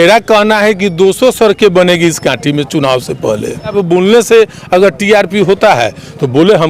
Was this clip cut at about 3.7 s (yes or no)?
yes